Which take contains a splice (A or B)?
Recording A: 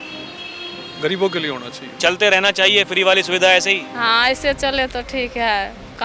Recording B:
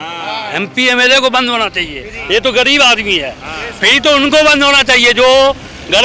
A